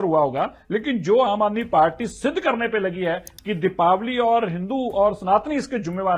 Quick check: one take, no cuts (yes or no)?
yes